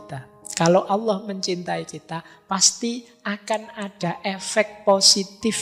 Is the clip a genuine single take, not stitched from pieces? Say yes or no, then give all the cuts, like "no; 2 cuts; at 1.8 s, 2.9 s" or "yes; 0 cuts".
yes; 0 cuts